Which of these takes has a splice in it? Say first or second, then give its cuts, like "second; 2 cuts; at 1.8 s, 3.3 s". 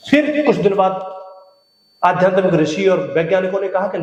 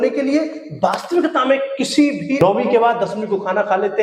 second; 1 cut; at 2.4 s